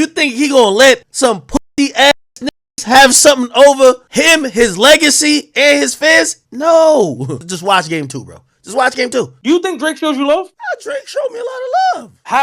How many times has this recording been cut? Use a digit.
1